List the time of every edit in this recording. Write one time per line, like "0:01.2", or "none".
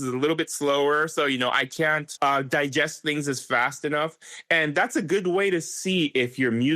0:02.1